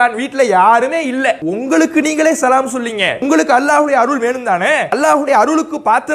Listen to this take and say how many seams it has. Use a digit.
3